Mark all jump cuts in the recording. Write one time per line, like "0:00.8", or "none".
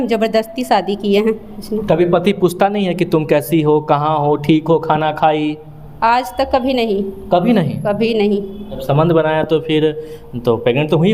0:01.6
0:08.8

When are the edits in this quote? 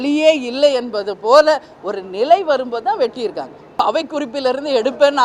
0:03.7

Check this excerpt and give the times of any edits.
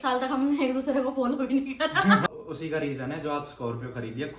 0:02.2

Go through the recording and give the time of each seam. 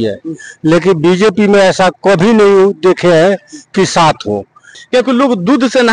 0:04.7

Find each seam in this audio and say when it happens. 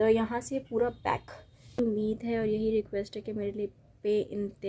0:01.8

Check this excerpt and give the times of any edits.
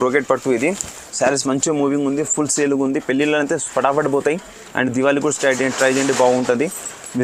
none

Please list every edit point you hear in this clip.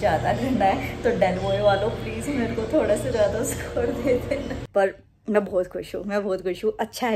0:04.6

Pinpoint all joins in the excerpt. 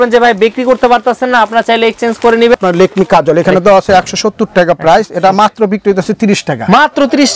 0:02.6

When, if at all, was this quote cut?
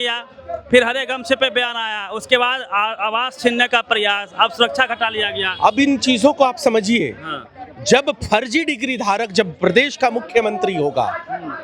none

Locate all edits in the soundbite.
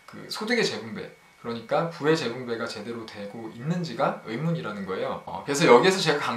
0:05.3

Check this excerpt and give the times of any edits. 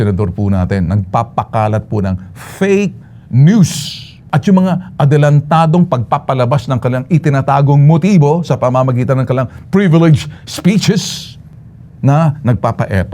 none

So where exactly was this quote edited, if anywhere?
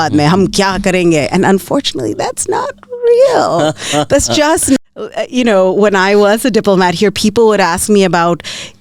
0:04.8

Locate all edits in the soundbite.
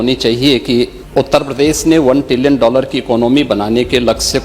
0:01.0

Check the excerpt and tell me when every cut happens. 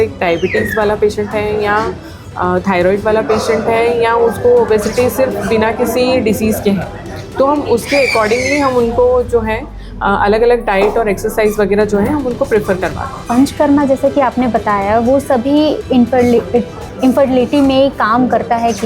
0:13.3

